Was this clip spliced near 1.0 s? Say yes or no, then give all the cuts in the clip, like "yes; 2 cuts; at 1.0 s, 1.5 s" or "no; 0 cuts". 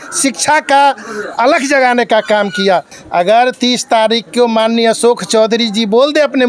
no; 1 cut; at 3.0 s